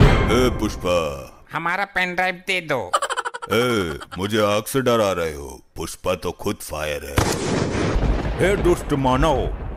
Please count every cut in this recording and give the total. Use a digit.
2